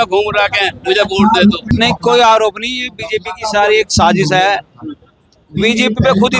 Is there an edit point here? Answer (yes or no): yes